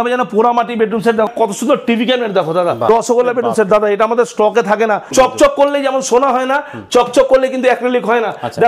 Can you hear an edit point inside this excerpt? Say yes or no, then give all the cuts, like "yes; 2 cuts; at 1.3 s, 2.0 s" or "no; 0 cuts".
yes; 3 cuts; at 1.3 s, 2.9 s, 5.1 s